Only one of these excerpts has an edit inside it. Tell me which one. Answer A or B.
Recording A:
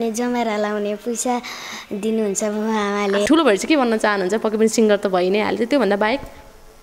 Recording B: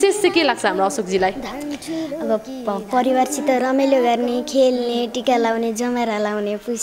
A